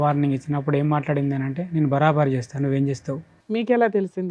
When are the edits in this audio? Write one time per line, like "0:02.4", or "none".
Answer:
0:03.3